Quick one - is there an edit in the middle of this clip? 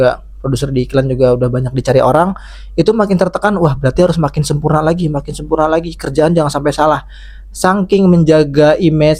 no; 0 cuts

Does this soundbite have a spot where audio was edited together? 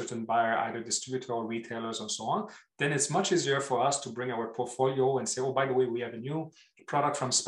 no; 0 cuts

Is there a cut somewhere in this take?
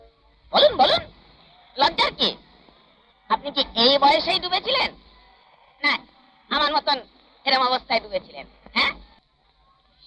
no; 0 cuts

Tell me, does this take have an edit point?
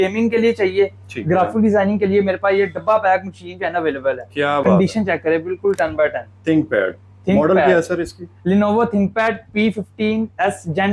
no; 0 cuts

